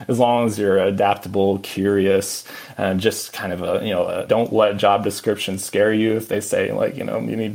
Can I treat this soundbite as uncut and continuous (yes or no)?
no